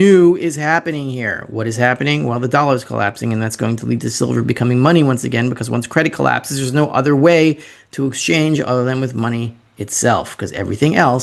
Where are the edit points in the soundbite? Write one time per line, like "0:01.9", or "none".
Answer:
none